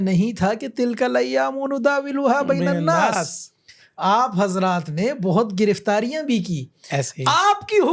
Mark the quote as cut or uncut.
uncut